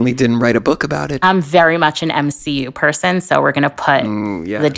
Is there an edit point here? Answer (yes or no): yes